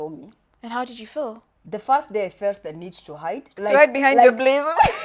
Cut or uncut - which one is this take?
cut